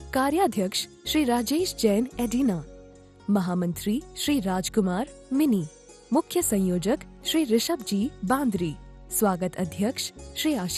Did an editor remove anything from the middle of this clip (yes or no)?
no